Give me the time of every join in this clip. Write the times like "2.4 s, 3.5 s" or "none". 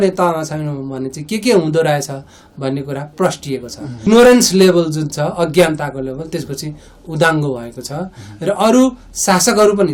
4.0 s